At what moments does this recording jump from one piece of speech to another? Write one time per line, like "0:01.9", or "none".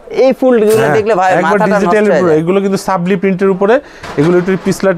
none